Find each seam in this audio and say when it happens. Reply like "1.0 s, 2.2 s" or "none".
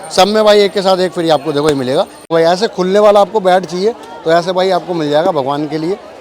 2.3 s